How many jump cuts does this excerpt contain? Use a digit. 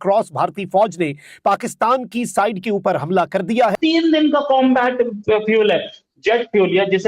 1